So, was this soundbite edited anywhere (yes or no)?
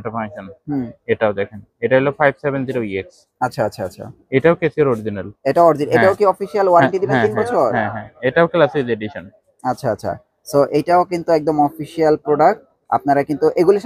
no